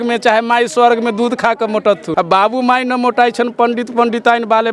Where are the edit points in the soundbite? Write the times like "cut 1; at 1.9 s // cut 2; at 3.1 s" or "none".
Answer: cut 1; at 2.1 s